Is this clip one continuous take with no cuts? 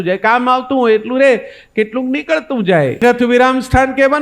no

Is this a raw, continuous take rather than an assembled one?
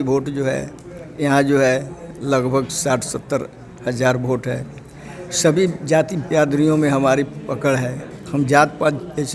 yes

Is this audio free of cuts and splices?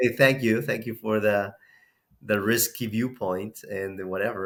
yes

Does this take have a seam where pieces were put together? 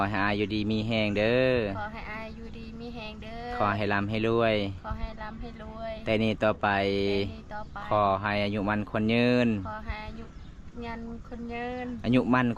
no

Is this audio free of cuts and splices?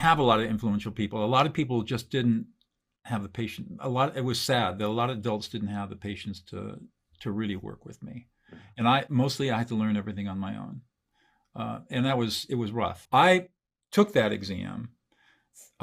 no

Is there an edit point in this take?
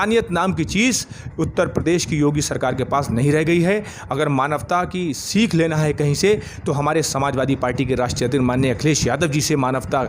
no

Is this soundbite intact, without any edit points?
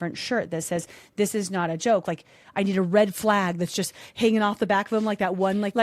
no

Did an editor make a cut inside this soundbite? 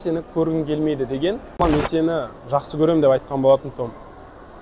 yes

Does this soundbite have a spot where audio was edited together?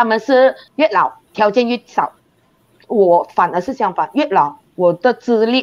yes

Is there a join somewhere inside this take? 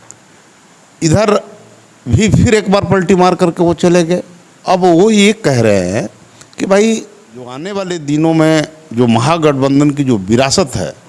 yes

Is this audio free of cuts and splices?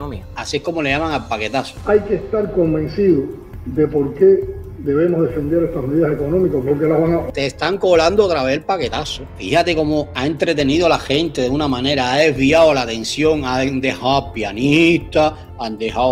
no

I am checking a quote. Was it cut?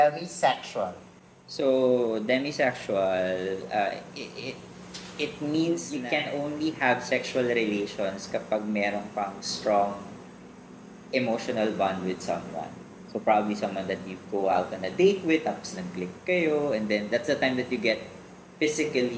yes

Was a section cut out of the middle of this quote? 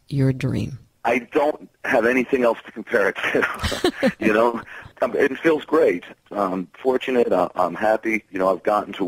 yes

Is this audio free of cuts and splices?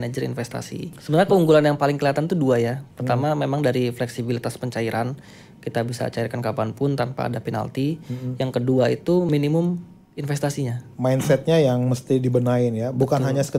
no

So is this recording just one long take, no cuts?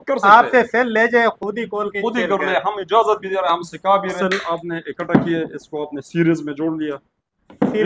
no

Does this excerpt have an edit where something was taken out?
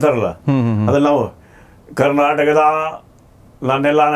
no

